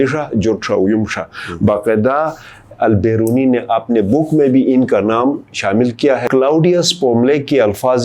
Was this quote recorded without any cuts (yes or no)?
no